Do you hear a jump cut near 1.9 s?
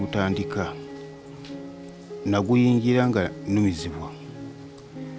no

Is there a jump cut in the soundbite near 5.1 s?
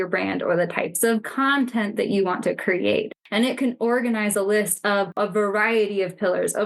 yes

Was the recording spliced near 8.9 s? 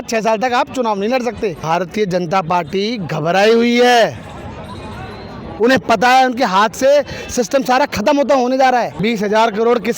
yes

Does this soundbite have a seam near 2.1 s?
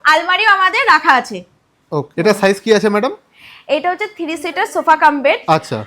yes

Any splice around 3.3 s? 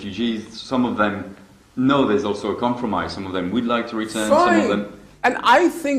yes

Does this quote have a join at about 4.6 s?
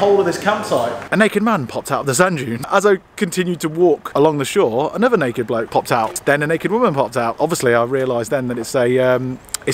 no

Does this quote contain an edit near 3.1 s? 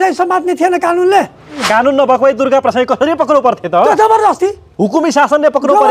no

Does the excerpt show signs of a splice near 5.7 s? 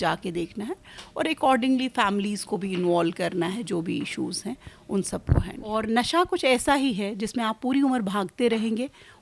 yes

